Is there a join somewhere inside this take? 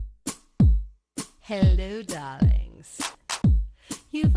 yes; 1 cut; at 1.1 s

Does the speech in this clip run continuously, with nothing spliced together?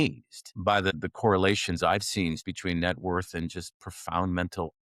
no; 2 cuts; at 1.0 s, 2.4 s

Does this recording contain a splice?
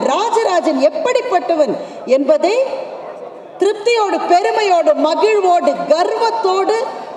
no; 0 cuts

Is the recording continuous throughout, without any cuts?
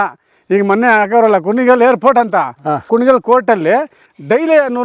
yes; 0 cuts

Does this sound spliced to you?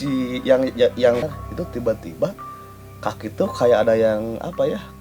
yes; 1 cut; at 1.3 s

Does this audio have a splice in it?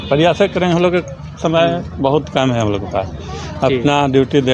no; 0 cuts

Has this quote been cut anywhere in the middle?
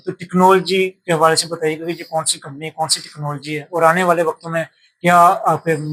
no; 0 cuts

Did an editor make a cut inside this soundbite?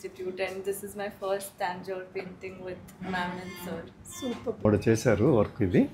yes; 1 cut; at 4.6 s

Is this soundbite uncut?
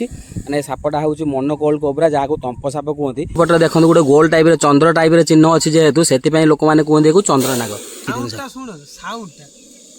no; 2 cuts; at 3.4 s, 8.0 s

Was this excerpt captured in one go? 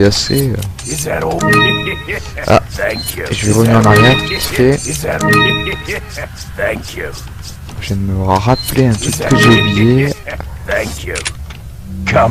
yes; 0 cuts

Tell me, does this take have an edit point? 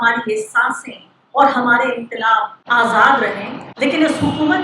yes; 1 cut; at 2.6 s

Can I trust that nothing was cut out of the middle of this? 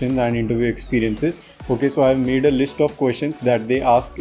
yes; 0 cuts

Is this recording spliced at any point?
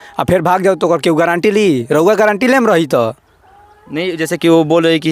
no; 0 cuts

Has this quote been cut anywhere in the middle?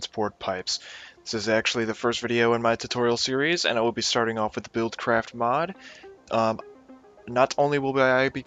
no; 0 cuts

